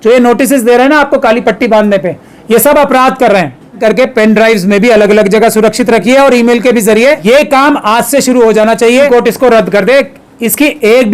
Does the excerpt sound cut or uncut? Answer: cut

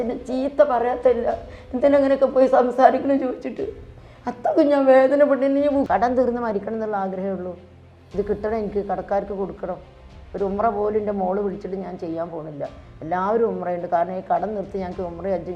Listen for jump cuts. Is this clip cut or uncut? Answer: cut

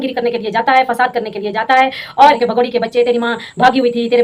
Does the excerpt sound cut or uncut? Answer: cut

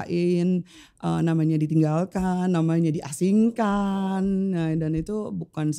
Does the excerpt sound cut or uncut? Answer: uncut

